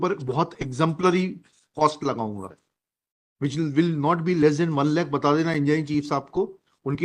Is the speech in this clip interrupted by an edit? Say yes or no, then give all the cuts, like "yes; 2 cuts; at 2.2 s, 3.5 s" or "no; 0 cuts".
no; 0 cuts